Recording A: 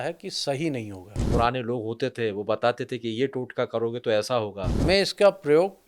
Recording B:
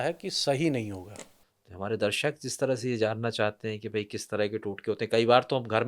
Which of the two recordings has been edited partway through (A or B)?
A